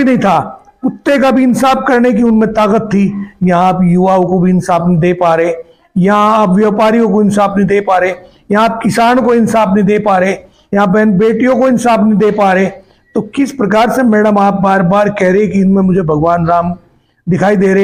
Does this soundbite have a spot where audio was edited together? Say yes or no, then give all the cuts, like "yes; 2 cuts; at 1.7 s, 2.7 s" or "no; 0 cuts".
no; 0 cuts